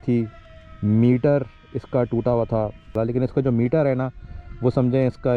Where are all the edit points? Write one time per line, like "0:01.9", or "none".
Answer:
0:02.9